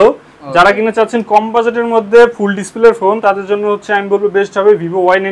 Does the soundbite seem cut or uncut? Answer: uncut